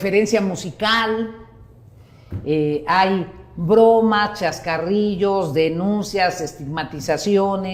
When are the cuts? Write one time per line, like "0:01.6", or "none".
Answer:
none